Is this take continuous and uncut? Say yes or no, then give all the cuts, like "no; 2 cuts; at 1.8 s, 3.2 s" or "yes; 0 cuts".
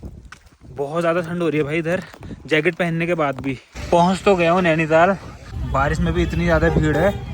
no; 2 cuts; at 3.7 s, 5.4 s